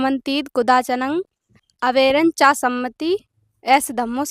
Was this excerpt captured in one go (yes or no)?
no